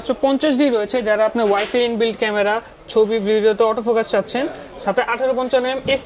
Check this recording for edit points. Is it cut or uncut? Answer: uncut